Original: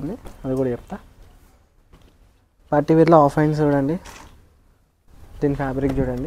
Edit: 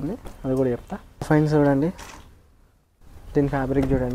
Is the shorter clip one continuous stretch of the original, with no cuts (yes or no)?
no